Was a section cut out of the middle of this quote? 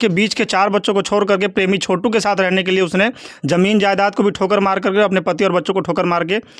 no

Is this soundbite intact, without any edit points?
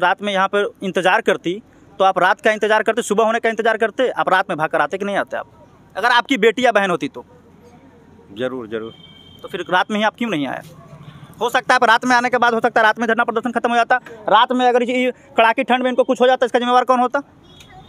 yes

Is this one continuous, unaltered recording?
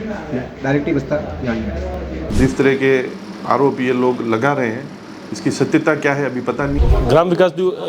no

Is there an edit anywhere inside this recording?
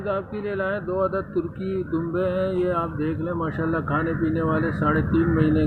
no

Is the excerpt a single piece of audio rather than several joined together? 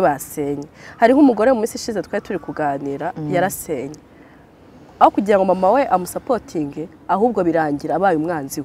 yes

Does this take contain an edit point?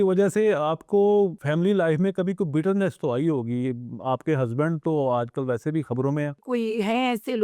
yes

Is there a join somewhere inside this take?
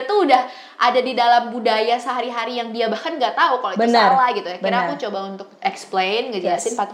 no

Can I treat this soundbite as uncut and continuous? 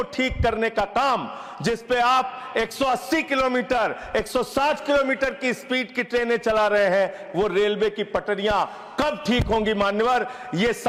yes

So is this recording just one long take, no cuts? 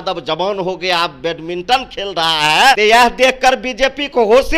no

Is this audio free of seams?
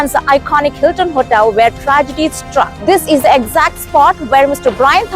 no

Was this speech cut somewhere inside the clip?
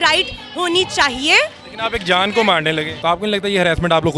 yes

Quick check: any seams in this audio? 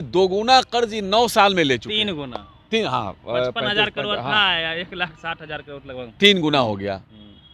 no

